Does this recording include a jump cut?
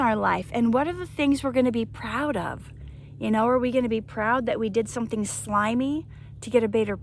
no; 0 cuts

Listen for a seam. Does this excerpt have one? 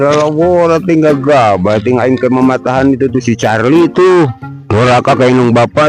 no; 0 cuts

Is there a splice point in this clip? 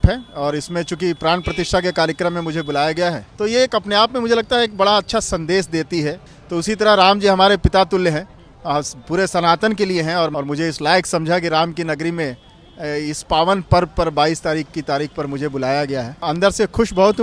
yes; 4 cuts; at 3.3 s, 6.3 s, 10.3 s, 16.2 s

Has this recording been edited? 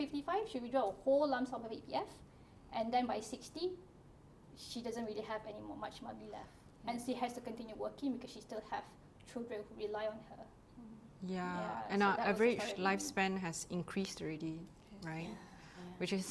no; 0 cuts

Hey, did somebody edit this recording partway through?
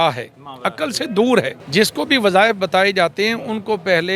yes; 1 cut; at 1.6 s

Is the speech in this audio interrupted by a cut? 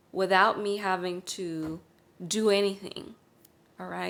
no; 0 cuts

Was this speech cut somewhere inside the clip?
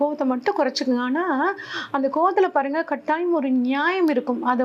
no; 0 cuts

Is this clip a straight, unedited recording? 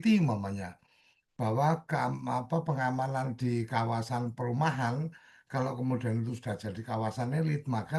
yes; 0 cuts

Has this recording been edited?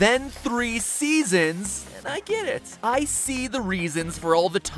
yes; 1 cut; at 1.2 s

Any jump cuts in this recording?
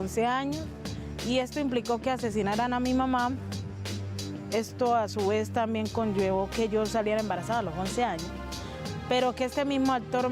no; 0 cuts

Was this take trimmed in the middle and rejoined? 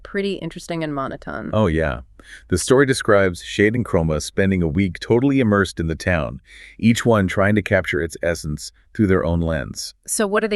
no; 0 cuts

